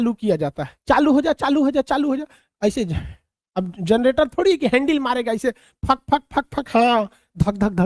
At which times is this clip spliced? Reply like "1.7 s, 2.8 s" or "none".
none